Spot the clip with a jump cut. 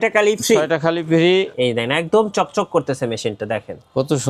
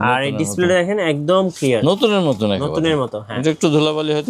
first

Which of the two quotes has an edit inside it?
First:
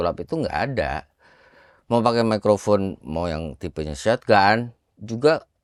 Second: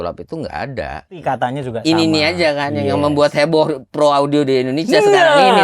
second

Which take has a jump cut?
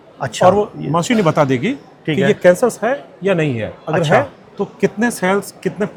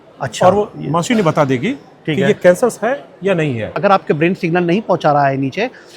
second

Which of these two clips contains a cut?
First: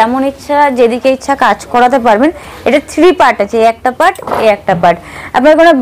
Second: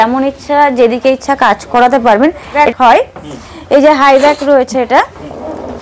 second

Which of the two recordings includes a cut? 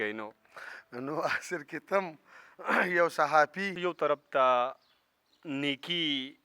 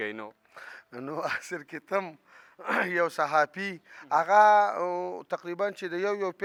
first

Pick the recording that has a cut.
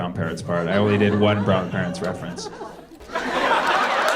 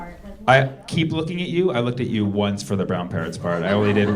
first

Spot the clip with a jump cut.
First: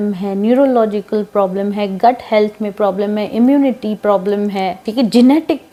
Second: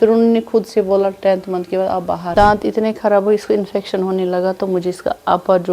second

